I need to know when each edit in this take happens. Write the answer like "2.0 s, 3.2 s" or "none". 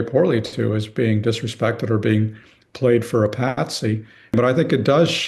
4.3 s